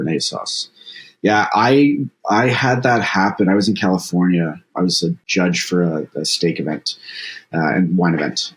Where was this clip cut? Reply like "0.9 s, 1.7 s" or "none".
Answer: 4.8 s